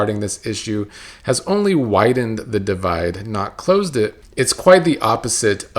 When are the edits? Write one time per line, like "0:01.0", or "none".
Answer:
0:04.2